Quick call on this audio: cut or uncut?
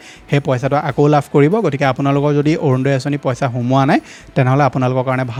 uncut